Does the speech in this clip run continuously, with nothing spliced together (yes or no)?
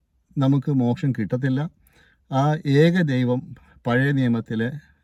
yes